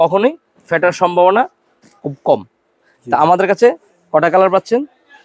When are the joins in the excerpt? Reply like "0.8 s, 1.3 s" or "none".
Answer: none